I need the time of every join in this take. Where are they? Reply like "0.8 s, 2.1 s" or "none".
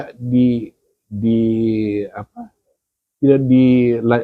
none